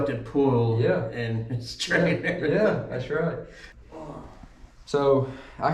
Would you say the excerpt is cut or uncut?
cut